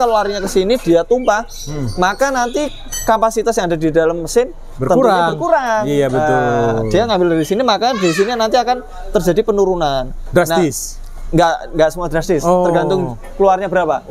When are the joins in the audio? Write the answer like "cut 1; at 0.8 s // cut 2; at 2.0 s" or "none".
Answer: none